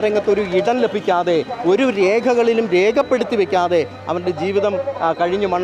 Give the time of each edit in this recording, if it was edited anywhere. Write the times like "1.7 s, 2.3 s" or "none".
none